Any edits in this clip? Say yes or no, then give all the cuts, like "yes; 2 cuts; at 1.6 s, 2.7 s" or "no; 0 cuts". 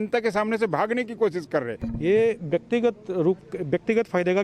yes; 1 cut; at 1.8 s